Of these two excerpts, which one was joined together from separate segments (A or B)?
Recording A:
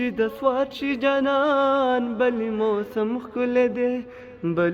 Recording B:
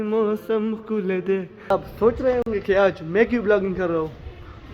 B